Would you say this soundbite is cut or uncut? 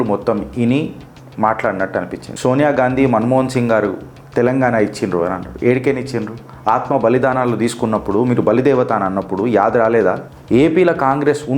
cut